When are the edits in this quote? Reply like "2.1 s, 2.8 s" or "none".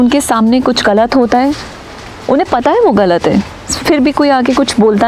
none